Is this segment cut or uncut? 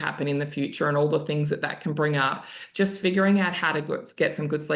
uncut